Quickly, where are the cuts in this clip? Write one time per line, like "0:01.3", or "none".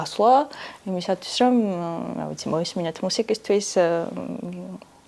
none

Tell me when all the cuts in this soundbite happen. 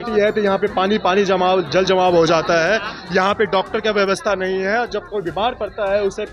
none

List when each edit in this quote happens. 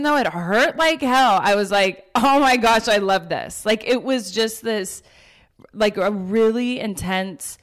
none

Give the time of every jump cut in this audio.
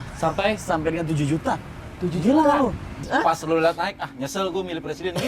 0:02.9

